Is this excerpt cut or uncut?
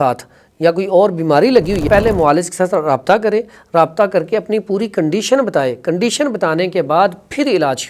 cut